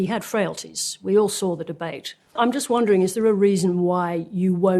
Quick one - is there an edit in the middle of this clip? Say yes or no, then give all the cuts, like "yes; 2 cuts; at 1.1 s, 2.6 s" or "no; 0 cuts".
yes; 1 cut; at 2.4 s